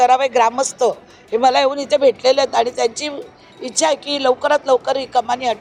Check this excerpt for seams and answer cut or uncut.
uncut